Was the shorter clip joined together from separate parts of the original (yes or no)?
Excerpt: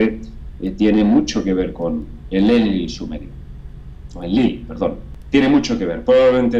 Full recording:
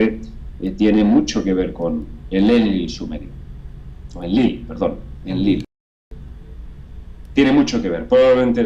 yes